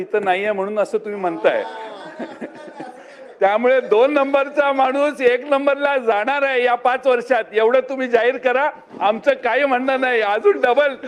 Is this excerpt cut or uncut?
uncut